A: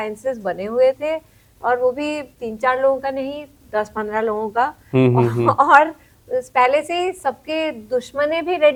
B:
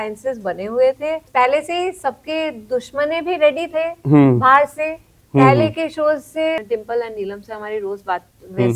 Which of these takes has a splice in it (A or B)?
B